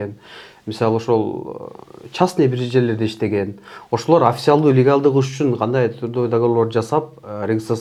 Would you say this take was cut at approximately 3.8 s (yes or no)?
no